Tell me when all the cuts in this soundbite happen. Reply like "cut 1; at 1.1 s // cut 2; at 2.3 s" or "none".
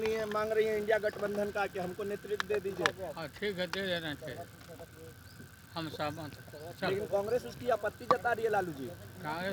none